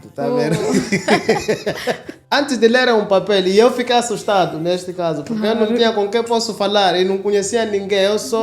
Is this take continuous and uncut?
no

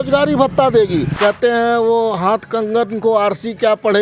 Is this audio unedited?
no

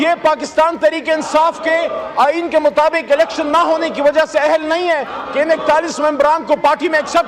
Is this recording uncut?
yes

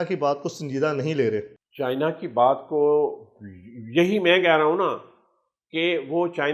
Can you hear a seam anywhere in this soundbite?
no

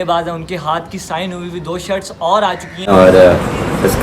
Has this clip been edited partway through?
yes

